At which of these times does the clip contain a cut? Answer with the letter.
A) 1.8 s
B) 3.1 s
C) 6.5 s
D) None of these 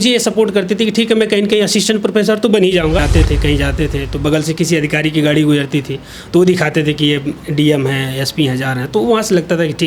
B